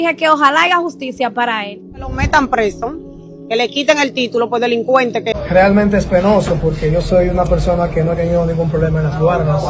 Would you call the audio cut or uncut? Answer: cut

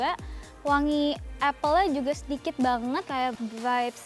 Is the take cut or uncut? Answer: cut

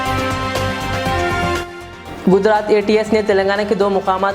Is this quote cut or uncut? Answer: cut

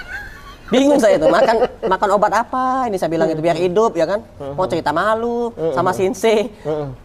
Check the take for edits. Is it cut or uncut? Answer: uncut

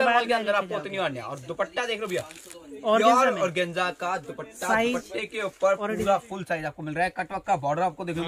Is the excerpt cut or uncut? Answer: uncut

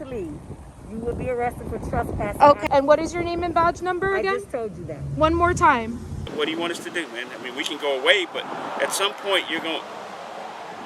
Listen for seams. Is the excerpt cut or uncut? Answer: cut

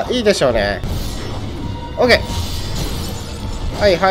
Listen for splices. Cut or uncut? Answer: cut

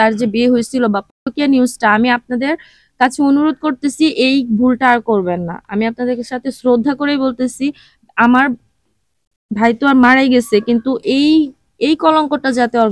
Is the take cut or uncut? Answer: uncut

